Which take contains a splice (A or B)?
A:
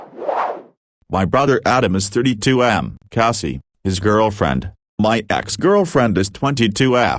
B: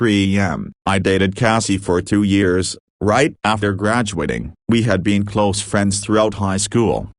A